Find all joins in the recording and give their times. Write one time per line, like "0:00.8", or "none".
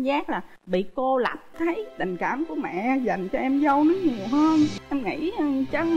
0:01.4
0:04.8